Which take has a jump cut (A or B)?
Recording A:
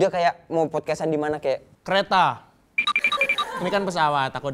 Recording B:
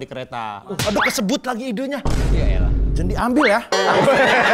A